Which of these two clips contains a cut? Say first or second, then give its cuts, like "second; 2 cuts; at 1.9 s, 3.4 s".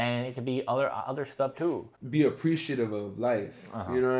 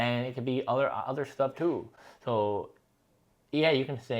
first; 1 cut; at 1.9 s